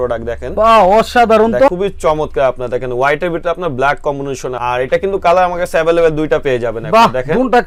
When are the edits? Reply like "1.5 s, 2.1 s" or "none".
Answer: none